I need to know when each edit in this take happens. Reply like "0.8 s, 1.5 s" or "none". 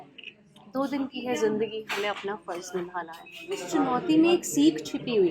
3.6 s